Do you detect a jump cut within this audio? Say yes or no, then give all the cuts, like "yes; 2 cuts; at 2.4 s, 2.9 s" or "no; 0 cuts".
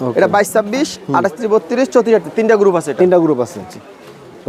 no; 0 cuts